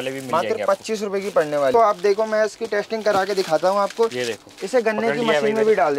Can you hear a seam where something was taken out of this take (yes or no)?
yes